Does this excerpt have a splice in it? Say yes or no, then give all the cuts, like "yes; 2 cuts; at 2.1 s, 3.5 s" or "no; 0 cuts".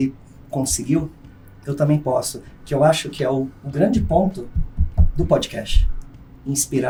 no; 0 cuts